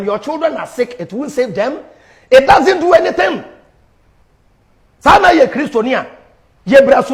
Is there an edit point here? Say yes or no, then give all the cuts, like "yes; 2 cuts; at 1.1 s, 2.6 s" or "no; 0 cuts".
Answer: no; 0 cuts